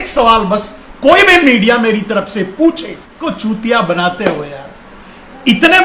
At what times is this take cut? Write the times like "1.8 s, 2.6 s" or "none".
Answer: 3.2 s